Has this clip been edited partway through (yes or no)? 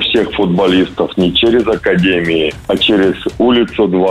yes